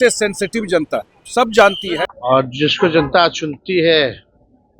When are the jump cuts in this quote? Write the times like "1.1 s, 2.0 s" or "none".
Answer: 2.0 s